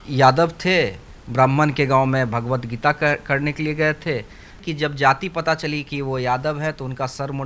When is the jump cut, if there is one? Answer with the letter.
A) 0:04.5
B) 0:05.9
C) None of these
A